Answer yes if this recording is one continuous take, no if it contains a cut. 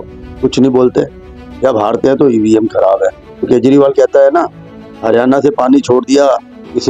no